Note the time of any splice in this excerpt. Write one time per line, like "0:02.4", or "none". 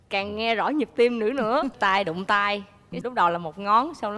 0:01.8